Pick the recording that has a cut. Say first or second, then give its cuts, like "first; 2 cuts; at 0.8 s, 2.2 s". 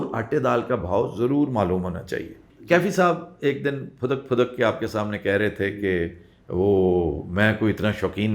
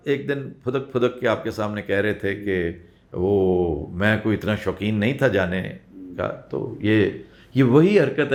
first; 1 cut; at 2.4 s